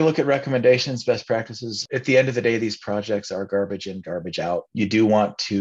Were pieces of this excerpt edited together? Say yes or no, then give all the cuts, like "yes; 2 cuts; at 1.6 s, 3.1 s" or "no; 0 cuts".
yes; 2 cuts; at 1.9 s, 4.7 s